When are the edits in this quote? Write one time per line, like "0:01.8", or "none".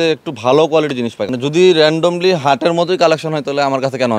0:01.2